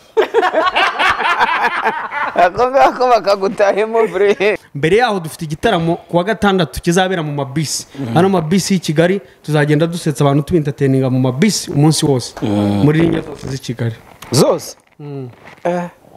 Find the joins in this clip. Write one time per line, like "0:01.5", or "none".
0:04.6